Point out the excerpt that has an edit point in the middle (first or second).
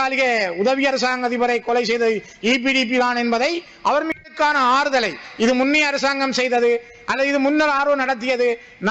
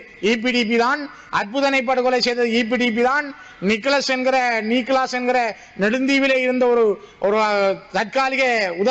first